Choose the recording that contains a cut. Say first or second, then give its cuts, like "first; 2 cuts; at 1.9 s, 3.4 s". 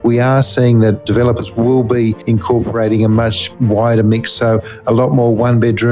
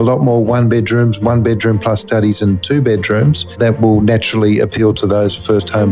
first; 3 cuts; at 1.0 s, 2.2 s, 3.4 s